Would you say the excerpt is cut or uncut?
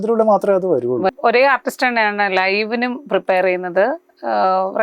cut